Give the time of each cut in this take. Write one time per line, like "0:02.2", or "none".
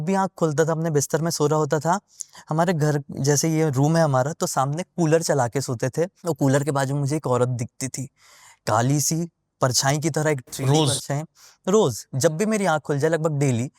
none